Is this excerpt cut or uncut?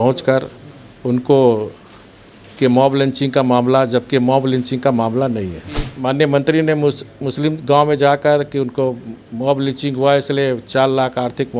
cut